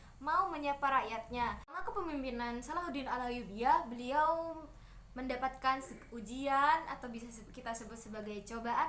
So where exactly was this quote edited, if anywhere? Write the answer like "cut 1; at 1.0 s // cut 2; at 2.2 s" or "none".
cut 1; at 1.6 s